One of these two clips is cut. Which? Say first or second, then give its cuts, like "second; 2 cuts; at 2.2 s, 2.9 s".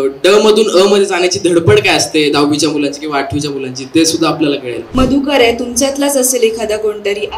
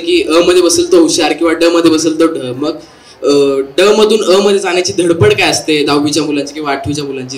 first; 1 cut; at 4.8 s